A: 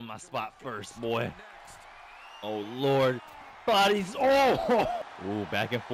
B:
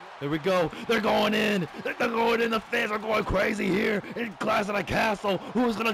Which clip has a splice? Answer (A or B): A